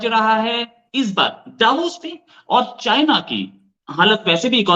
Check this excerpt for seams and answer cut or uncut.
uncut